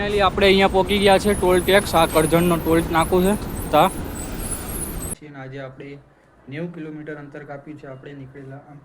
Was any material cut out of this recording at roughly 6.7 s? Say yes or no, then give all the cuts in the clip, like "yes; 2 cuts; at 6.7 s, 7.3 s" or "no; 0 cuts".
no; 1 cut; at 5.1 s